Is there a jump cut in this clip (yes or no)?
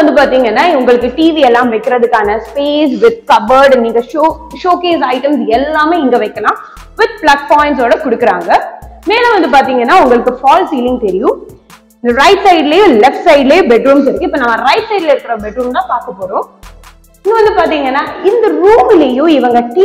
no